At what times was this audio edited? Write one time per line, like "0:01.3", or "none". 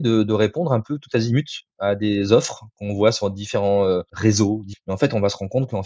0:04.5